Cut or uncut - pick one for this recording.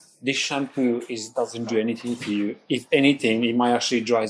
uncut